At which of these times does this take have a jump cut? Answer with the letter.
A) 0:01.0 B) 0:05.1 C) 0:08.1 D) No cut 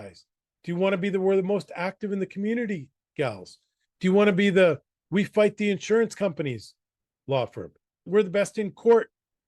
C